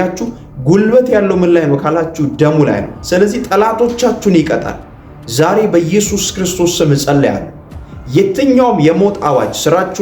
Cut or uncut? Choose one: cut